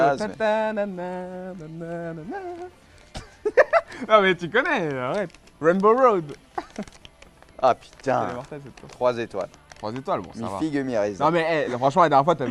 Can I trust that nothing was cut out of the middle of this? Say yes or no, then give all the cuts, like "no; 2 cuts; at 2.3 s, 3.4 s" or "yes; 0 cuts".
no; 1 cut; at 5.2 s